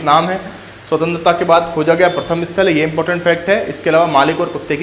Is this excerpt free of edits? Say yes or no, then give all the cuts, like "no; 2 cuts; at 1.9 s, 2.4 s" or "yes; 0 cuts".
yes; 0 cuts